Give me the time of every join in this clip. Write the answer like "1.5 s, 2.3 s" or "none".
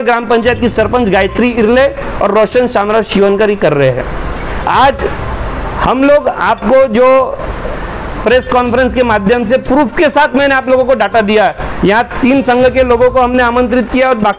none

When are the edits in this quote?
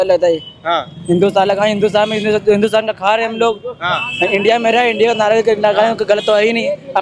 none

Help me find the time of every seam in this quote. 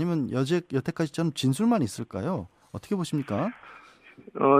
2.2 s

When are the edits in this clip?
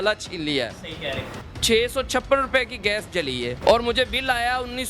1.3 s, 3.6 s

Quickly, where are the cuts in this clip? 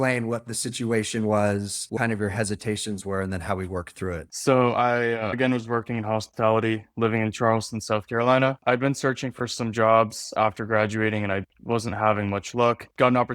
2.0 s, 5.3 s

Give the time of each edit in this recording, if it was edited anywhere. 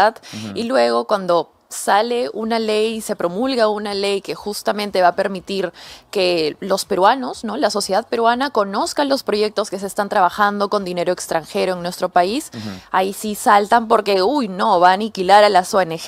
none

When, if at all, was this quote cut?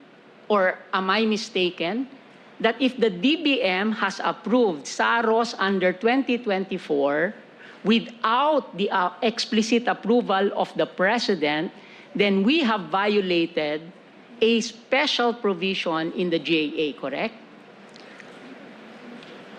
none

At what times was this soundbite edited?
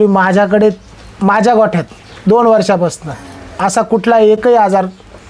none

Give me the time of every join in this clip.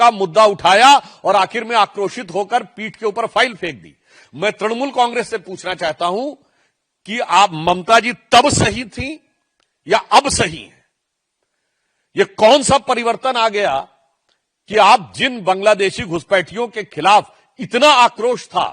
none

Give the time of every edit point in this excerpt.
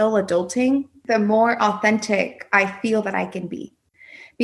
0.9 s

